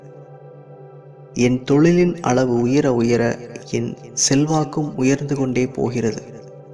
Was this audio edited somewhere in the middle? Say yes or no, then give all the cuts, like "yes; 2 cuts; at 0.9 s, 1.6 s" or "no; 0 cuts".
no; 0 cuts